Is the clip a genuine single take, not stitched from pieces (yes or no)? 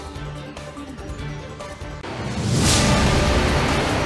yes